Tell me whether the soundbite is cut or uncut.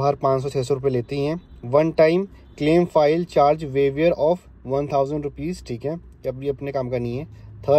uncut